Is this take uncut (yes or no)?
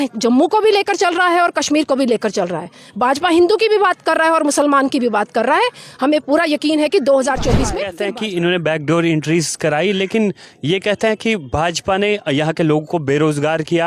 no